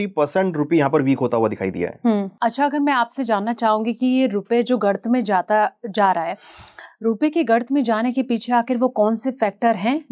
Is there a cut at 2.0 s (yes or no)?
no